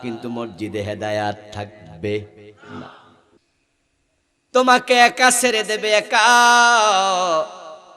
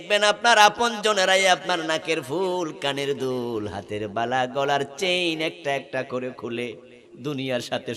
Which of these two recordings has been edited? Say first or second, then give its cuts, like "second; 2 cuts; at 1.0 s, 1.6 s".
first; 1 cut; at 3.4 s